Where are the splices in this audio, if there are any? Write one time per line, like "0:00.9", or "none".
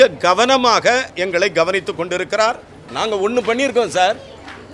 0:02.8